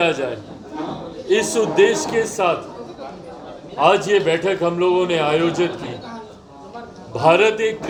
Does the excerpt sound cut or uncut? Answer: uncut